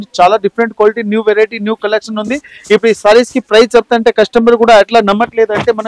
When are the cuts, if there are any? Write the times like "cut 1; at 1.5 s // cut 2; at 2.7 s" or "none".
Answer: none